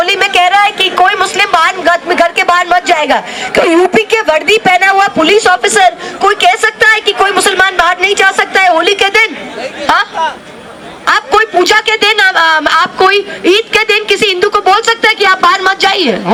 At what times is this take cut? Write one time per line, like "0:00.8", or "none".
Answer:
none